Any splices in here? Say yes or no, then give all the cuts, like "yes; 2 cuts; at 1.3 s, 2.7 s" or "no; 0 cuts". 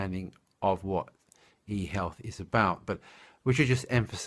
no; 0 cuts